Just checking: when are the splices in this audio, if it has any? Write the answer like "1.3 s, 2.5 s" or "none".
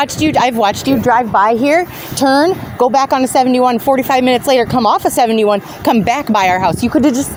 none